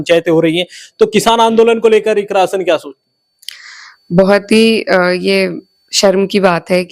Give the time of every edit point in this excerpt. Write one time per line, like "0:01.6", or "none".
none